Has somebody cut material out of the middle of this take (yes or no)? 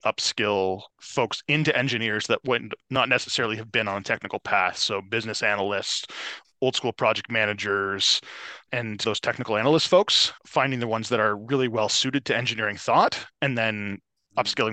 yes